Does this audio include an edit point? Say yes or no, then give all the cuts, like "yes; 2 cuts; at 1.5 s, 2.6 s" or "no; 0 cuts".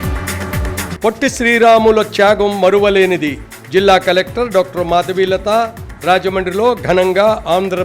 yes; 1 cut; at 0.9 s